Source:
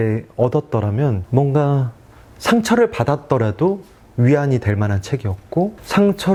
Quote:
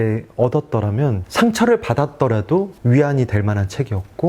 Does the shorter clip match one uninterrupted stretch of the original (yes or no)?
no